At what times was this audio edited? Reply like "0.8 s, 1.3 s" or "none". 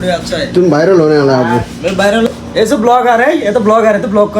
2.3 s